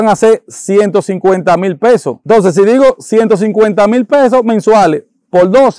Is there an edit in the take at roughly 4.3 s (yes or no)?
no